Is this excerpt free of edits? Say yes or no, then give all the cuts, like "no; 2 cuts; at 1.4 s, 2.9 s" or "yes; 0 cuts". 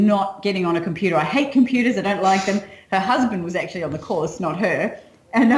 yes; 0 cuts